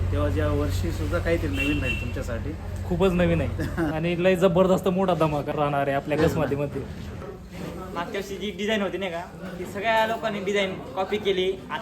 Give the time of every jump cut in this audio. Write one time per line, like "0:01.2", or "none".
0:03.9
0:05.5
0:07.2